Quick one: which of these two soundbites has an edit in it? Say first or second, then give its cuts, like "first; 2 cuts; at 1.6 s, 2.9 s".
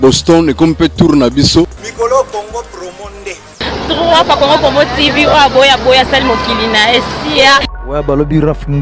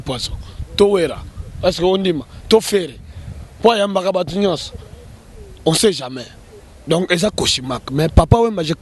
first; 2 cuts; at 1.8 s, 7.7 s